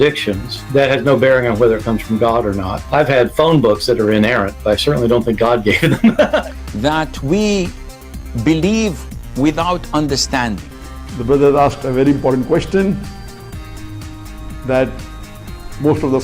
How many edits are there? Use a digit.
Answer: 1